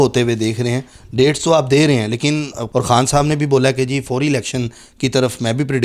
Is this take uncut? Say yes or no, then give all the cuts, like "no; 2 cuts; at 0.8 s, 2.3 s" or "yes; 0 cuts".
no; 1 cut; at 2.6 s